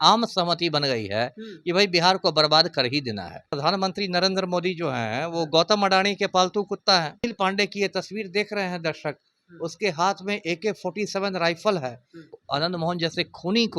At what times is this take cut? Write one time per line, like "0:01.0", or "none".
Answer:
0:03.5
0:07.3
0:12.3